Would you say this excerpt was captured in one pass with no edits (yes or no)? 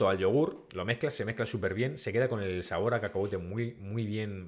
yes